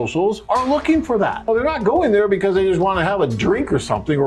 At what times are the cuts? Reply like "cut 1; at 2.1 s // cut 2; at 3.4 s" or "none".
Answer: cut 1; at 1.5 s